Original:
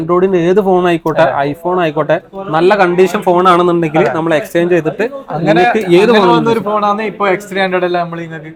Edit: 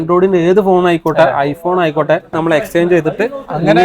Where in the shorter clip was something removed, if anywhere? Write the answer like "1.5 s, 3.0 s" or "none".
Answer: 2.4 s